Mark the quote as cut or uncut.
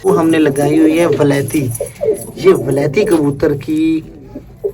uncut